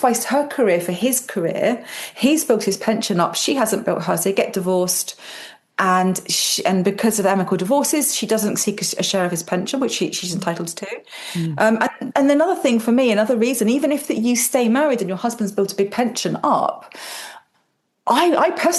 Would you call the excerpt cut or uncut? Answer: uncut